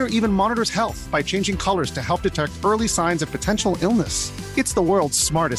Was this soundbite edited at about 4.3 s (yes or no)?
no